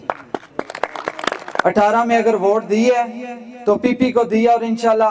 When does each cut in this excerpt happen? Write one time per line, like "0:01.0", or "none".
0:01.6